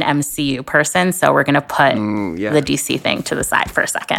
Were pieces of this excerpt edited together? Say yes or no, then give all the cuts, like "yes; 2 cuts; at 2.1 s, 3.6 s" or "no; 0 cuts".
no; 0 cuts